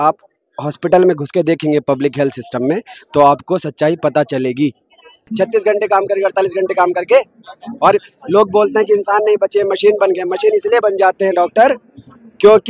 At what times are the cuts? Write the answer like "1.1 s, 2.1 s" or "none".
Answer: 5.2 s